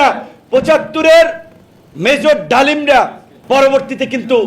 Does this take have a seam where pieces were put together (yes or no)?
yes